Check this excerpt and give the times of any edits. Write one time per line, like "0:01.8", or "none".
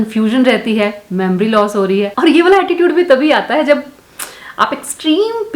0:02.1

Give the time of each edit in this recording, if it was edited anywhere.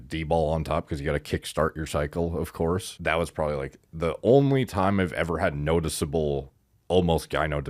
0:02.9

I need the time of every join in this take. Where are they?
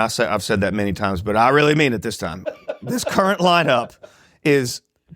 0:02.6

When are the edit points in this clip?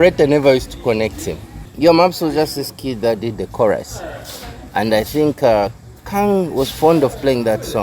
0:01.7

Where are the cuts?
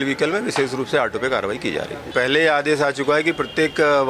0:02.1

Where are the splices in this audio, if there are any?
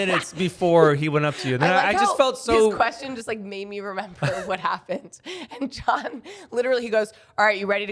none

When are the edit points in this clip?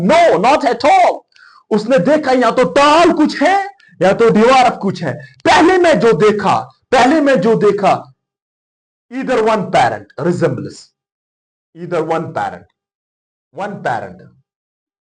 none

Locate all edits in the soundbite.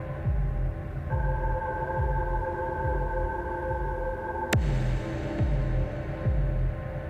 none

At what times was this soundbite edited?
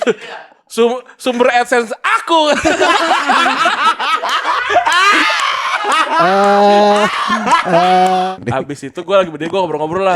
0:08.3

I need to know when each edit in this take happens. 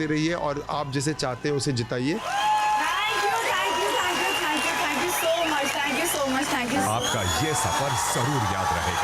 0:06.8

